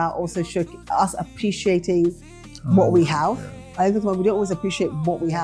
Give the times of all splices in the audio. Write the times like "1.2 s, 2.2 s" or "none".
none